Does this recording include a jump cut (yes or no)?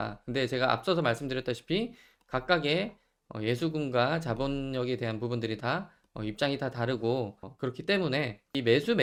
no